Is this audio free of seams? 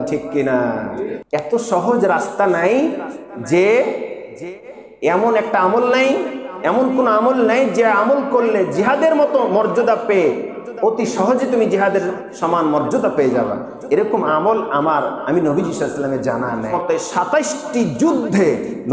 no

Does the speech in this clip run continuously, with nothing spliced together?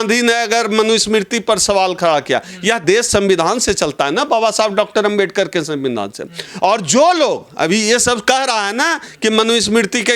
no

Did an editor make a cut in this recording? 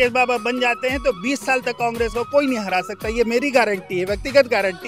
no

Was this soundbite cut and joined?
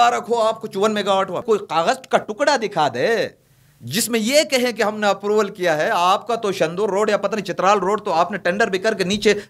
yes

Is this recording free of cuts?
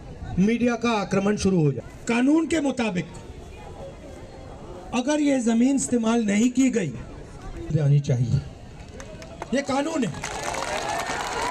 no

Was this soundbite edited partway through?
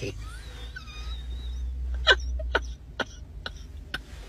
no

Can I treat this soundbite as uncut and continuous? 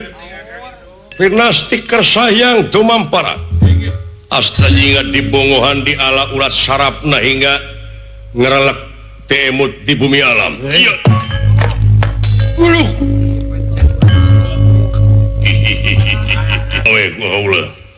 no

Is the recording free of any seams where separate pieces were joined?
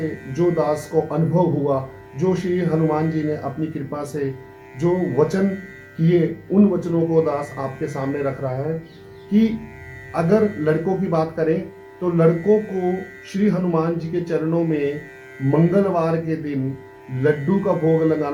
yes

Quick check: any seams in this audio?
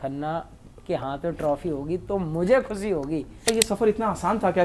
yes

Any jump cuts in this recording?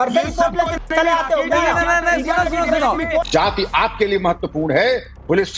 yes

